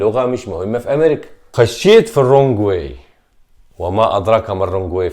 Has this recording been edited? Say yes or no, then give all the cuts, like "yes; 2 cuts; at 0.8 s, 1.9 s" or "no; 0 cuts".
yes; 1 cut; at 1.5 s